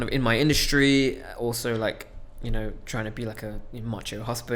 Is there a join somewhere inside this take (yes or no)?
no